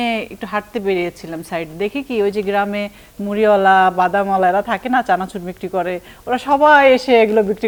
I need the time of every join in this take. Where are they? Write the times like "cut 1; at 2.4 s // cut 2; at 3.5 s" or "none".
none

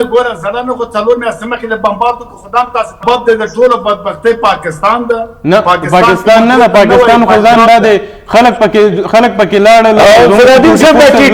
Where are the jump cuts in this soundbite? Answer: cut 1; at 3.0 s

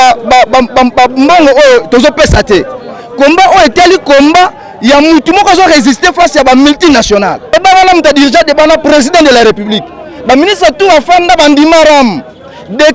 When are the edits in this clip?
cut 1; at 7.5 s

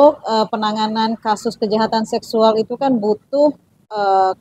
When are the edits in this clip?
none

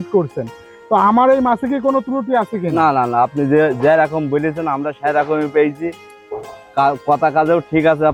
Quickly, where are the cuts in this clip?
none

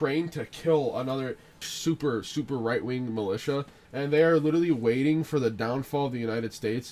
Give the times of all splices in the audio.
cut 1; at 1.7 s // cut 2; at 3.8 s

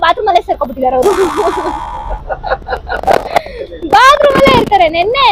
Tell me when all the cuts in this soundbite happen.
none

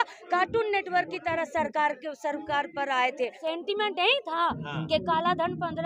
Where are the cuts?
cut 1; at 3.4 s

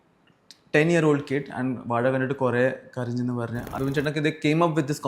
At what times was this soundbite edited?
cut 1; at 3.7 s

